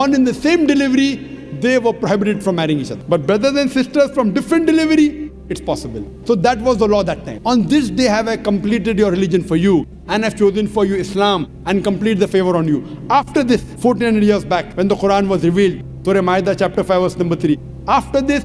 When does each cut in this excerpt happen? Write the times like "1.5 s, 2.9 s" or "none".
2.9 s, 7.3 s, 13.7 s, 14.7 s